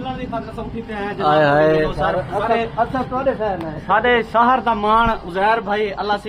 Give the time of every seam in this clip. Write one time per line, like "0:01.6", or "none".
none